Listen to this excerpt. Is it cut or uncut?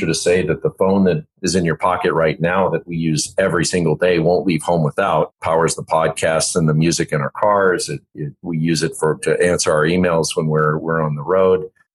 cut